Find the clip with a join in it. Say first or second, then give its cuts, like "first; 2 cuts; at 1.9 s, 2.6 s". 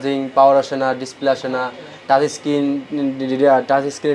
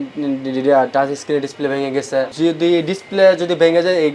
second; 1 cut; at 2.3 s